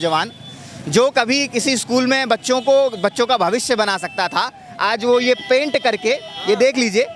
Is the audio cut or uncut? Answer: uncut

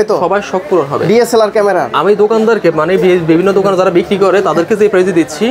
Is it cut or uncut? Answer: uncut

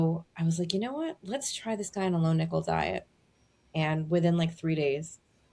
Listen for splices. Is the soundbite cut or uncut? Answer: uncut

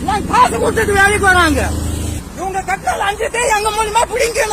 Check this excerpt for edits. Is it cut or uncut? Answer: cut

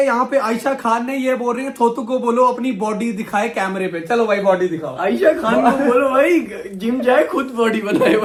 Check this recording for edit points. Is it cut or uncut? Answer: uncut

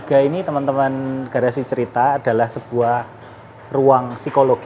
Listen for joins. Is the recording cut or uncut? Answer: uncut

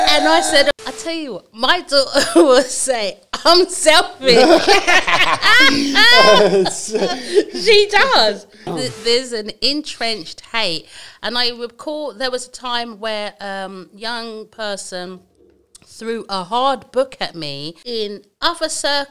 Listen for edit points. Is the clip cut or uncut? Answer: cut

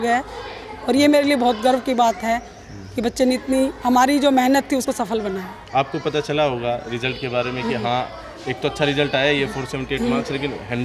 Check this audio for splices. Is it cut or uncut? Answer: uncut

